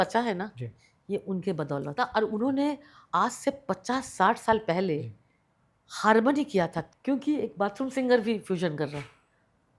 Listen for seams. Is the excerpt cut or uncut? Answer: cut